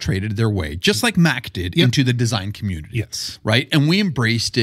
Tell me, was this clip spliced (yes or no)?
no